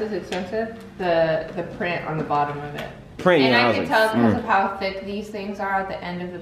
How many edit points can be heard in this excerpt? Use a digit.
0